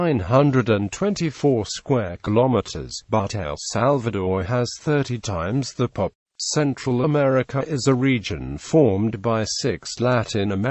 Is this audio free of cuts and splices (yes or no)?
yes